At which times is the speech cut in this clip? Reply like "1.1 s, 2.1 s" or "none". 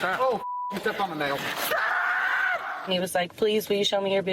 2.9 s